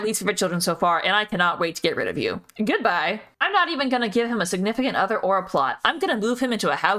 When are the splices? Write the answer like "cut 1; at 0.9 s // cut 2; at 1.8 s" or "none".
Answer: none